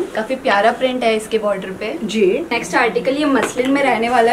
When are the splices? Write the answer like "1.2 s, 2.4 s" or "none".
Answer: 2.5 s